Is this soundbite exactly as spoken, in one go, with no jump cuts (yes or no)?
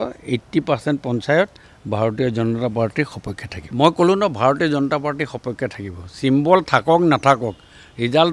yes